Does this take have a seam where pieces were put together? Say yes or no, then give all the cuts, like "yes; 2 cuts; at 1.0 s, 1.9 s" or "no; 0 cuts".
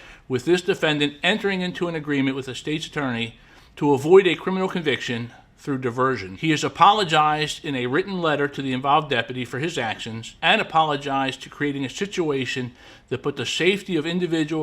yes; 2 cuts; at 6.3 s, 10.2 s